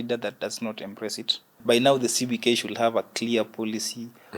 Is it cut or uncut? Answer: cut